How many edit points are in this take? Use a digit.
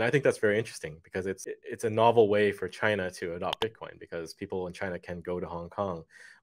1